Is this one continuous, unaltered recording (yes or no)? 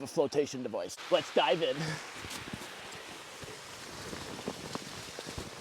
no